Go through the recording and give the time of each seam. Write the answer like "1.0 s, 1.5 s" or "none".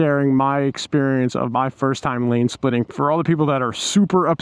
2.9 s